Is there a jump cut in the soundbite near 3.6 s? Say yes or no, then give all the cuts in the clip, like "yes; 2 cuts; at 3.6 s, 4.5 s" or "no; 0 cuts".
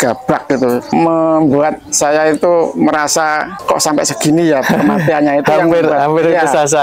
yes; 2 cuts; at 0.9 s, 3.6 s